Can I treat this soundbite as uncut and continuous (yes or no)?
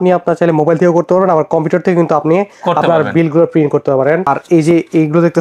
no